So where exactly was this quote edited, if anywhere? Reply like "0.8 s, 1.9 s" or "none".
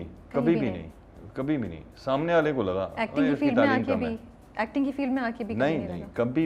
none

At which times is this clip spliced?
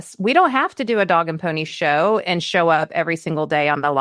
none

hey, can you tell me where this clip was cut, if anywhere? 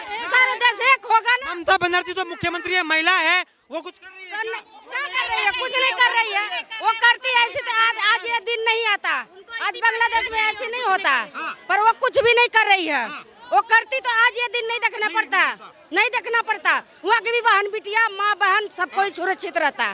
none

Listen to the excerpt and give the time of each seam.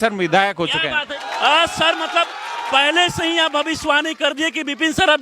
1.1 s

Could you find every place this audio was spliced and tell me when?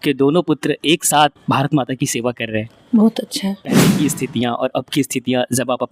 3.9 s

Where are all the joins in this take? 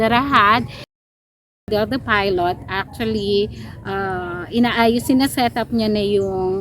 1.7 s

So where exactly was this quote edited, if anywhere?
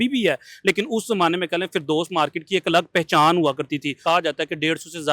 3.9 s

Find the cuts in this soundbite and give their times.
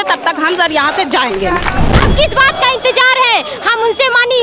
1.9 s

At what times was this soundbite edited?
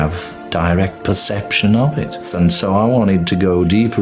2.3 s

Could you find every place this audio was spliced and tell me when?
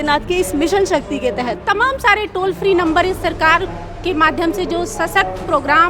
1.6 s

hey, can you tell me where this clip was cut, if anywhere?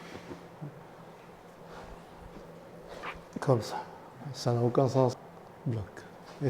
5.2 s

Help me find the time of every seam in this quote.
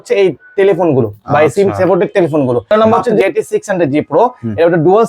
3.0 s

